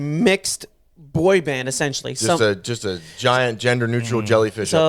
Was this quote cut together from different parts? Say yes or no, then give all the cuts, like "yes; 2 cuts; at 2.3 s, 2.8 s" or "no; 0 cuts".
no; 0 cuts